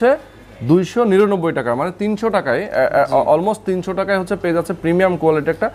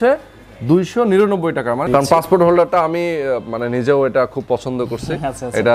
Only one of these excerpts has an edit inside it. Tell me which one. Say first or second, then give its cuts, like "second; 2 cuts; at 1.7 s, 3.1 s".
second; 1 cut; at 1.9 s